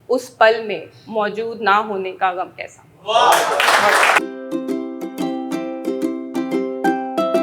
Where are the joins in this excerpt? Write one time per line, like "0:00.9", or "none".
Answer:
0:04.2